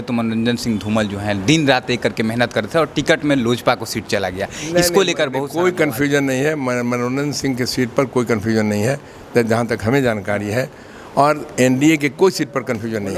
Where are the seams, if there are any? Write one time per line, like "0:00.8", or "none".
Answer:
none